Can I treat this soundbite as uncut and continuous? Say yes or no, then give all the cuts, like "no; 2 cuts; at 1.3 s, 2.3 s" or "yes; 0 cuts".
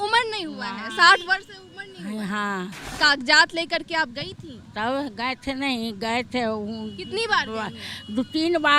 no; 1 cut; at 2.9 s